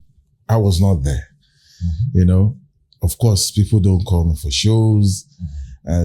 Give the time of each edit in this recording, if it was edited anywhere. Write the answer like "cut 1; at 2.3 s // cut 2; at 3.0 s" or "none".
none